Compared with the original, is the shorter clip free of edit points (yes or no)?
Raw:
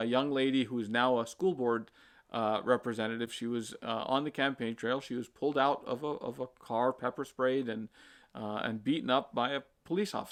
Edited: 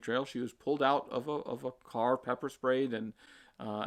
yes